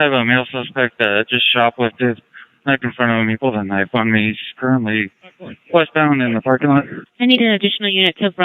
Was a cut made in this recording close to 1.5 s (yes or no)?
yes